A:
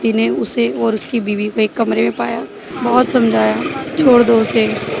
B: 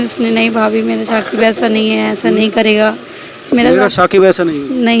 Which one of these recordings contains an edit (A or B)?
A